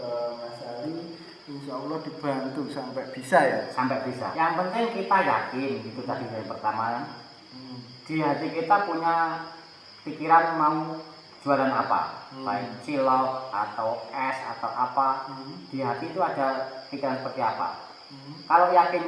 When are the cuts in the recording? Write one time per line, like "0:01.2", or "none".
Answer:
0:04.2